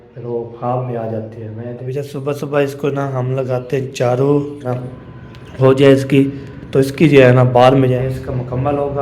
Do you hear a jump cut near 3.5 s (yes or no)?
no